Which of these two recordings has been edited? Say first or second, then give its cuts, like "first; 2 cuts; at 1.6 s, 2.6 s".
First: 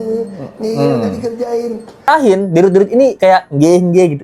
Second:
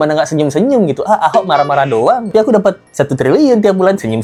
first; 1 cut; at 2.1 s